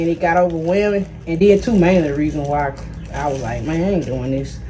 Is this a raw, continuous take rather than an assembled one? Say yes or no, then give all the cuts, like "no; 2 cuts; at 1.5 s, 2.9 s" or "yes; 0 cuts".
yes; 0 cuts